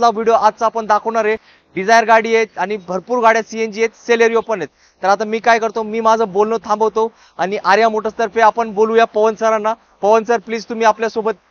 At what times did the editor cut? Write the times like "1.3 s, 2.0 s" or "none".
none